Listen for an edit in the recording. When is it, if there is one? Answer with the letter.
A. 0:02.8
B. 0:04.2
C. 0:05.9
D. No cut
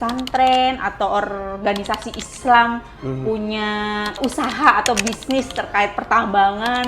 B